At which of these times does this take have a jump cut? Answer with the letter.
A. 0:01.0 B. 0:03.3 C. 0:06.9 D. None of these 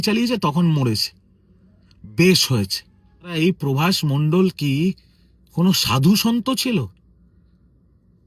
B